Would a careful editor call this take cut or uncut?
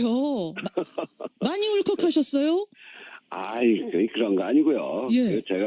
cut